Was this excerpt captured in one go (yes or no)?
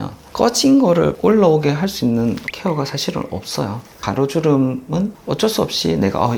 no